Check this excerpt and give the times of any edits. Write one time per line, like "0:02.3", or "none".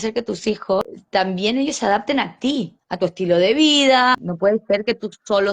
0:01.0
0:04.3